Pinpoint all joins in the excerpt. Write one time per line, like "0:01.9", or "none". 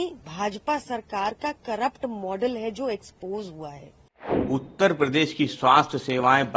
0:04.3